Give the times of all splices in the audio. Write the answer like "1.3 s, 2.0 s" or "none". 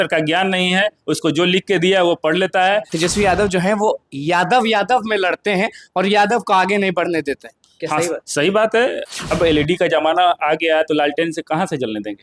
2.9 s, 9.1 s